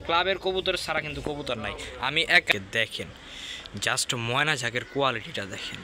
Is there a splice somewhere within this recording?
yes; 1 cut; at 2.5 s

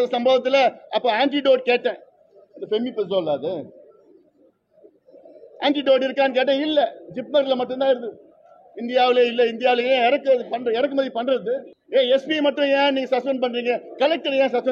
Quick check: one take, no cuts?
no; 1 cut; at 11.7 s

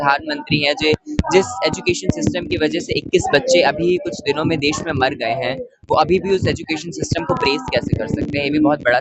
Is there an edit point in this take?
no; 0 cuts

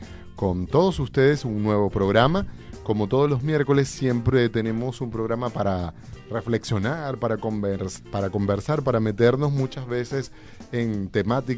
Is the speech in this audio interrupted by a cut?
yes; 1 cut; at 1.4 s

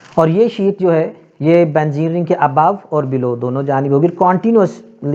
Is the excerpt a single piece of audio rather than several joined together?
yes; 0 cuts

